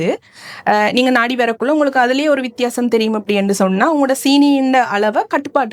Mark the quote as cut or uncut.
uncut